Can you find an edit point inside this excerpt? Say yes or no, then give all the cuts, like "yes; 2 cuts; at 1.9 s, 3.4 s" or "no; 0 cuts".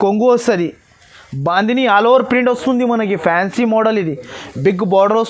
no; 0 cuts